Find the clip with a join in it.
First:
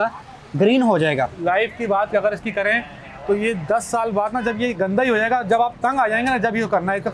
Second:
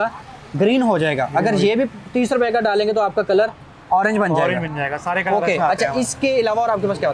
first; 1 cut; at 1.3 s

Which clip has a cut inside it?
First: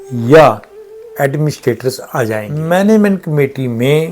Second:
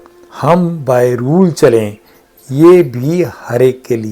first; 1 cut; at 2.5 s

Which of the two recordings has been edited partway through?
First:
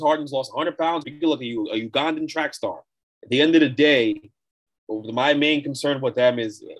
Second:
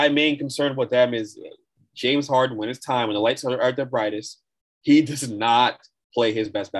first; 1 cut; at 1.0 s

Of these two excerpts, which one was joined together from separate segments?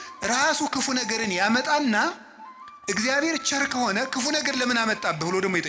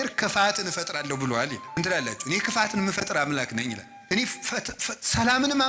second; 2 cuts; at 1.8 s, 3.9 s

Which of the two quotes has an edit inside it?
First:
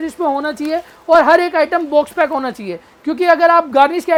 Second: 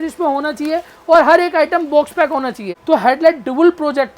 second; 1 cut; at 2.7 s

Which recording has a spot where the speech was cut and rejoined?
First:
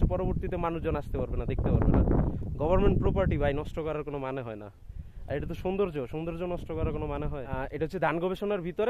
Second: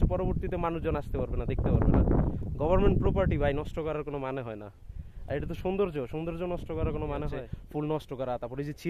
second; 1 cut; at 7.4 s

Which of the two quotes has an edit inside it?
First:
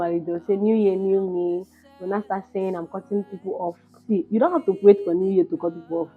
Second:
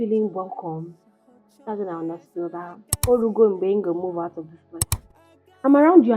second; 2 cuts; at 2.8 s, 5.0 s

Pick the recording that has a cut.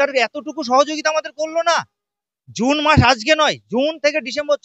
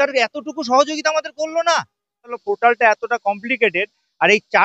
second; 1 cut; at 2.3 s

